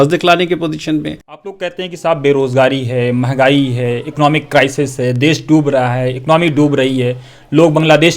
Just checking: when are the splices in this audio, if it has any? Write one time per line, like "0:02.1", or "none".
0:01.5